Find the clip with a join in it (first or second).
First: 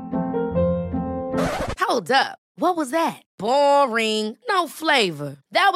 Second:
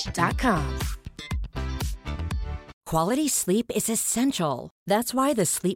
second